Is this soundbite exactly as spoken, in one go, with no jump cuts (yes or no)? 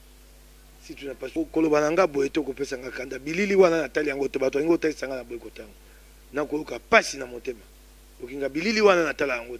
no